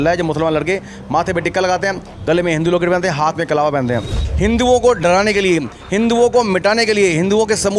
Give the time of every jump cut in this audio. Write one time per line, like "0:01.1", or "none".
0:04.2